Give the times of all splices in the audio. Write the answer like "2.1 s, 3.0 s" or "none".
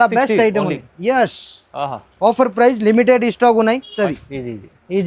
3.9 s